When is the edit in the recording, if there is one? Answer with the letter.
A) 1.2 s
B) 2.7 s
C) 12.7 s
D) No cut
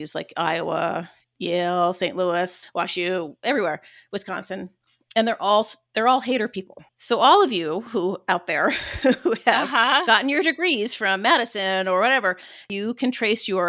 C